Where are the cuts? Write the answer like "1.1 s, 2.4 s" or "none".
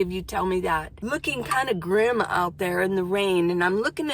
0.9 s